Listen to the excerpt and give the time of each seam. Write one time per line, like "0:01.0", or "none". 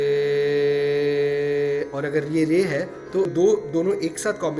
0:03.3